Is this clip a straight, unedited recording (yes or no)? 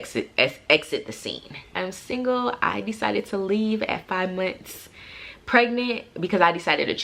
no